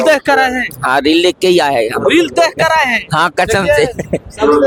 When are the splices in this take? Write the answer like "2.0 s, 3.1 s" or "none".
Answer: none